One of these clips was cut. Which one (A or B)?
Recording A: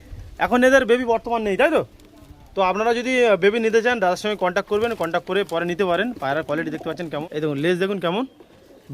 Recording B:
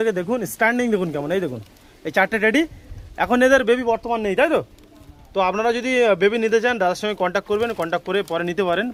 A